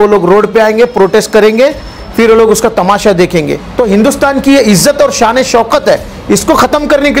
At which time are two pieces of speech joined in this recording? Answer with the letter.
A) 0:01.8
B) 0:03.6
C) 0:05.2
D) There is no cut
B